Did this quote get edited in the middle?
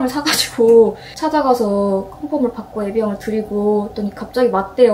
yes; 1 cut; at 1.1 s

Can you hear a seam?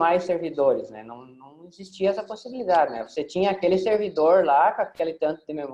no; 0 cuts

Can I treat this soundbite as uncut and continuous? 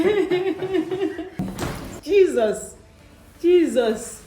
no; 1 cut; at 1.3 s

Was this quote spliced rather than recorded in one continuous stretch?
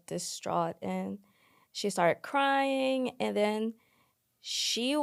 no; 0 cuts

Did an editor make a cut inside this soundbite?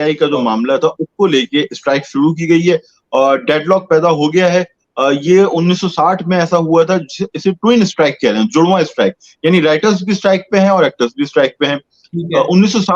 no; 0 cuts

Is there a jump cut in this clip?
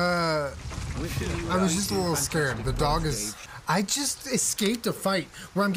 yes; 1 cut; at 3.3 s

